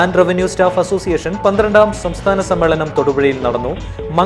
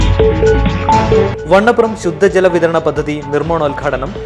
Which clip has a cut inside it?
second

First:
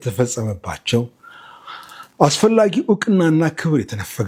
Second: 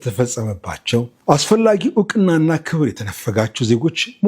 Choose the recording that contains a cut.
second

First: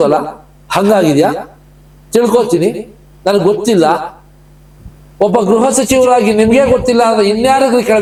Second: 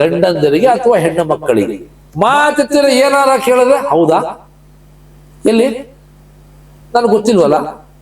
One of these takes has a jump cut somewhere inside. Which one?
second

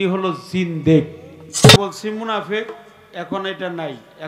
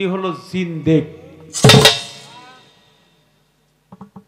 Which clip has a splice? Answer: first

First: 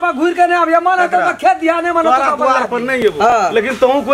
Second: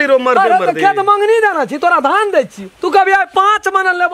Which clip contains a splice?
first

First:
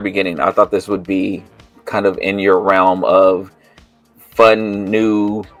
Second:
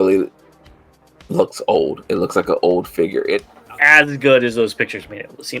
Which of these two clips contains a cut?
second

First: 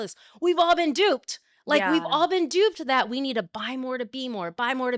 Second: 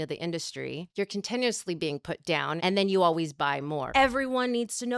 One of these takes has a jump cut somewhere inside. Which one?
second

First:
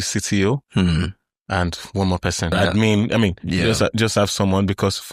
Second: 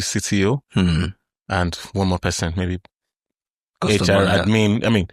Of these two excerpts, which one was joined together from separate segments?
first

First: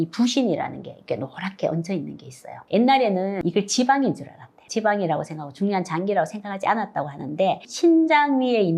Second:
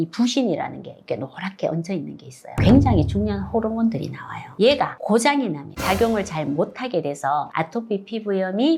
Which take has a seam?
second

